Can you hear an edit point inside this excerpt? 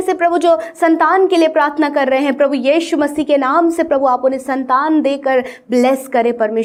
no; 0 cuts

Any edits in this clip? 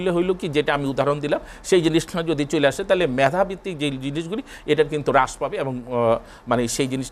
no; 0 cuts

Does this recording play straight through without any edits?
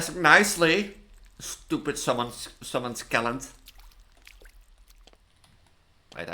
no; 1 cut; at 4.8 s

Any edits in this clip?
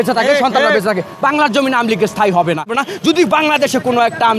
yes; 1 cut; at 2.7 s

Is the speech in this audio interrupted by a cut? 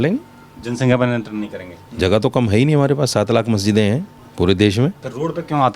yes; 2 cuts; at 1.8 s, 4.2 s

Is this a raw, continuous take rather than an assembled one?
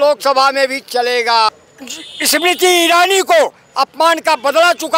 yes; 0 cuts

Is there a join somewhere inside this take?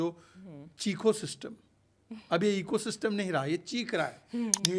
no; 0 cuts

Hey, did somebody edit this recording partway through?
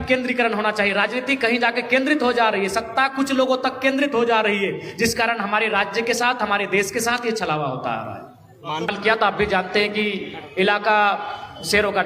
yes; 1 cut; at 8.9 s

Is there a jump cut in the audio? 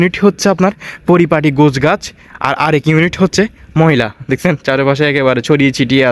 no; 0 cuts

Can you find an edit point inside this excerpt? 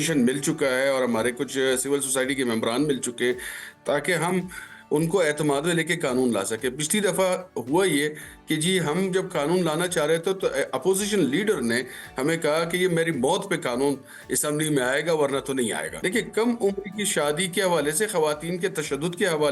yes; 1 cut; at 16.0 s

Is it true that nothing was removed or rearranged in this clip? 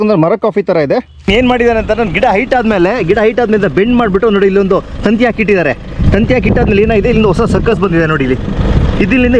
no; 1 cut; at 1.3 s

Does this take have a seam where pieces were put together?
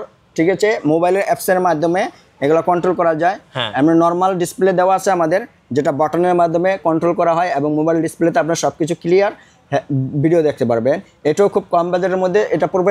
no; 0 cuts

